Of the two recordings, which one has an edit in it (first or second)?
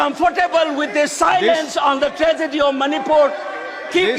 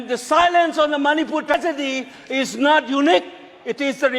second